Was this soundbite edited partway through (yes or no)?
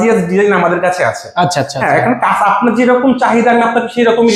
no